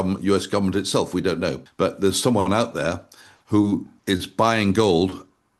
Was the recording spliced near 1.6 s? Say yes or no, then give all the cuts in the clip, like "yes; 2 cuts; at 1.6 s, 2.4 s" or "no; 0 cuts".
yes; 2 cuts; at 1.6 s, 3.9 s